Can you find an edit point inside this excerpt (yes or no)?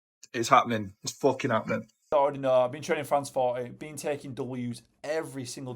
yes